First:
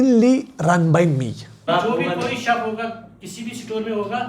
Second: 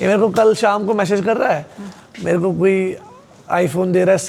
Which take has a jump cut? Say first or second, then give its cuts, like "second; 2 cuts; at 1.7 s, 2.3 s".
first; 1 cut; at 1.5 s